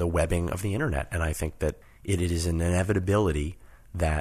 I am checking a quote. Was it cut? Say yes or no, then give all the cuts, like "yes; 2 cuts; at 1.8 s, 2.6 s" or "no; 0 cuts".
yes; 1 cut; at 1.9 s